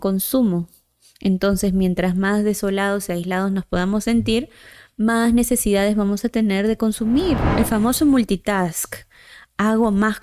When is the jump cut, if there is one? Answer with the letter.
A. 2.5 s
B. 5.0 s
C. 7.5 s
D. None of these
C